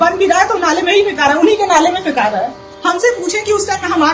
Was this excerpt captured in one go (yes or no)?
no